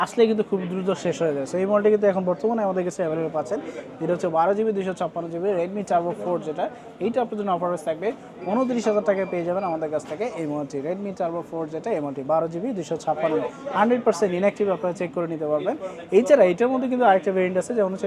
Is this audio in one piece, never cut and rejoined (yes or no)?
yes